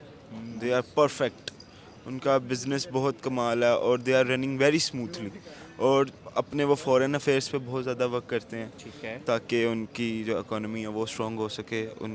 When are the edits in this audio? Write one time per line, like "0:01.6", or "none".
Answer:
none